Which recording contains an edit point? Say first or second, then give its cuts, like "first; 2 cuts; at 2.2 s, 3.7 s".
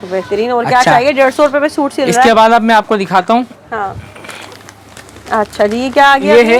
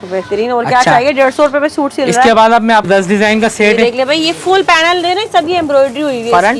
second; 1 cut; at 2.9 s